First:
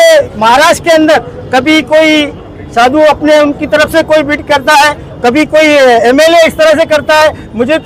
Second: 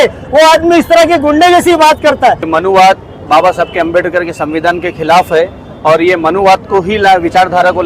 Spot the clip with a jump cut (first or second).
second